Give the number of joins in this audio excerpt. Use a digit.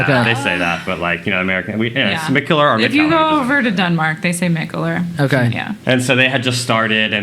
0